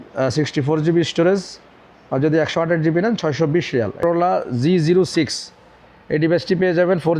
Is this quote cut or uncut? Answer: cut